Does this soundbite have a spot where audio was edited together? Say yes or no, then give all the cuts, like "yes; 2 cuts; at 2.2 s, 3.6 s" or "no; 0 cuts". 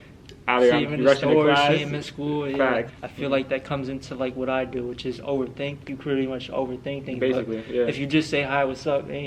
yes; 1 cut; at 2.9 s